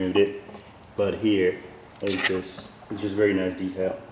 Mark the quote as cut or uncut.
uncut